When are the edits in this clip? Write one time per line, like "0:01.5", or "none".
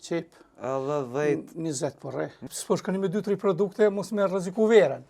0:02.4